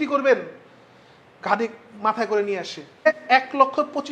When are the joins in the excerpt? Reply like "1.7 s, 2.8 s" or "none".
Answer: 3.1 s